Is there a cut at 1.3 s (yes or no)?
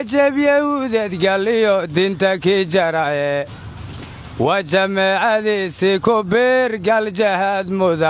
no